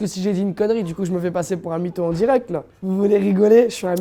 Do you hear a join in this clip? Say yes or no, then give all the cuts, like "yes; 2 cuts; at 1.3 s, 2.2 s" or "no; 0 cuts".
no; 0 cuts